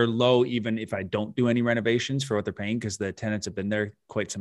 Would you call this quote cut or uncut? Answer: uncut